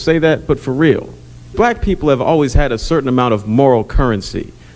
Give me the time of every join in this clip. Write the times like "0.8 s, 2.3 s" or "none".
1.5 s